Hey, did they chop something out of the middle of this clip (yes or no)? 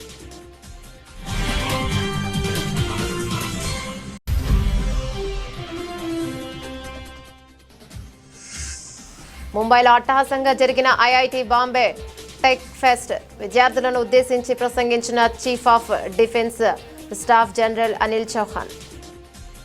yes